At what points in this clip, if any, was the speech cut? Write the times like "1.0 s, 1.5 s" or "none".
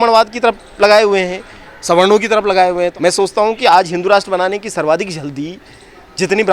2.9 s